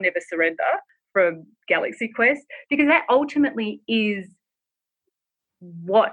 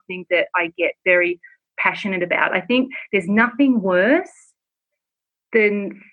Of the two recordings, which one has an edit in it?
first; 1 cut; at 1.0 s

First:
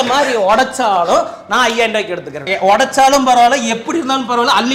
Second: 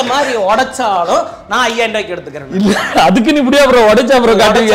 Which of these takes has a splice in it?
first; 1 cut; at 2.4 s

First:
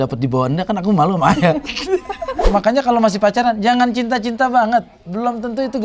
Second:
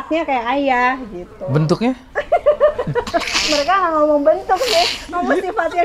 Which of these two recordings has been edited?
first; 1 cut; at 2.5 s

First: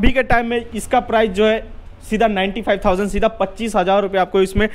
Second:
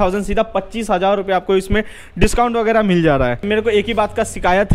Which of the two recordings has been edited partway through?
second; 1 cut; at 3.4 s

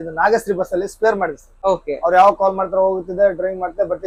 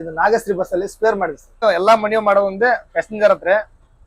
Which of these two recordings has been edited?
second; 1 cut; at 1.6 s

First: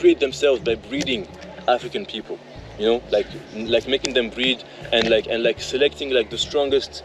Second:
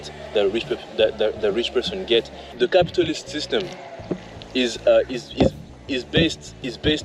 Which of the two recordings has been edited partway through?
second; 1 cut; at 2.5 s

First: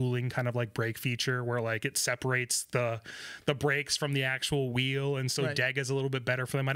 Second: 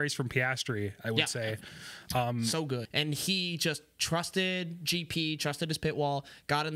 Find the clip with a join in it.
second; 1 cut; at 2.9 s

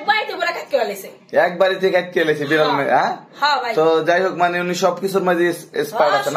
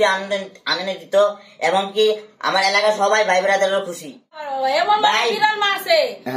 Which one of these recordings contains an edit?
second; 1 cut; at 4.4 s

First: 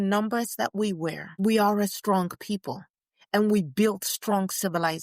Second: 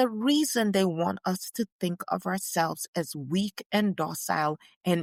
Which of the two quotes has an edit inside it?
first; 1 cut; at 1.4 s

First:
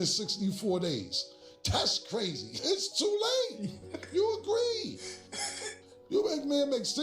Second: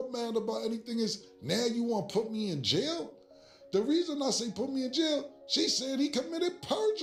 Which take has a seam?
first; 1 cut; at 2.6 s

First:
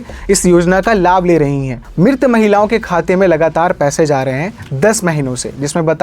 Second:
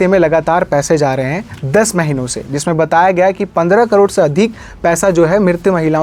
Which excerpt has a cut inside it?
first; 1 cut; at 1.8 s

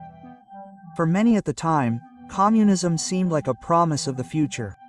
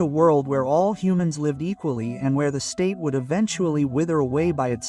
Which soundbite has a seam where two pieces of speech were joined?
first; 1 cut; at 0.9 s

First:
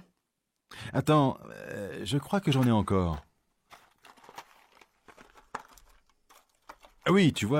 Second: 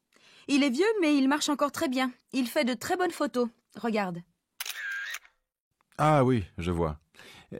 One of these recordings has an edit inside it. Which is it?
second; 1 cut; at 1.2 s

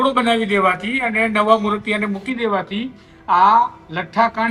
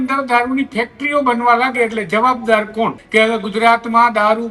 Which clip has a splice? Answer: second; 1 cut; at 3.0 s

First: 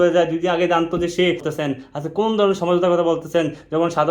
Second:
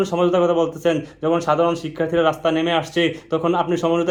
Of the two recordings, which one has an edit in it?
first; 1 cut; at 1.5 s

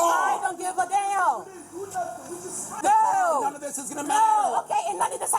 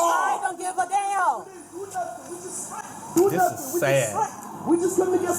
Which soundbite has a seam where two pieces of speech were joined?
first; 1 cut; at 2.8 s

